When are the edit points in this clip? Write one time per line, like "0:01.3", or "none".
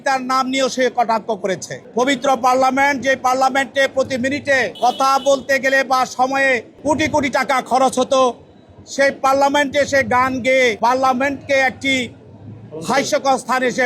0:01.7
0:04.7
0:06.7
0:10.8